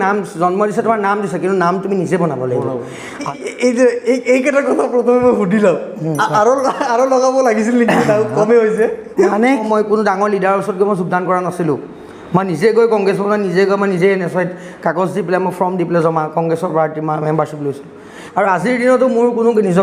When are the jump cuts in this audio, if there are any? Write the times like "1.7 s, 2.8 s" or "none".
3.3 s, 9.6 s, 18.1 s